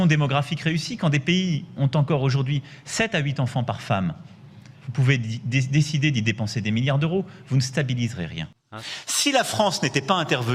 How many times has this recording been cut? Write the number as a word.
one